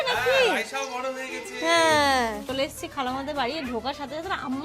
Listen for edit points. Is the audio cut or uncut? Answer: cut